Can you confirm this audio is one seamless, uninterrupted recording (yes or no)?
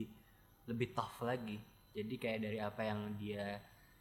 yes